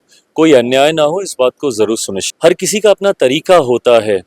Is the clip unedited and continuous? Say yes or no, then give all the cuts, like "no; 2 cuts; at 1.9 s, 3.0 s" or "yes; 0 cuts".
no; 1 cut; at 2.2 s